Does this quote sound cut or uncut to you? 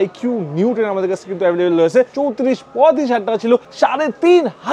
cut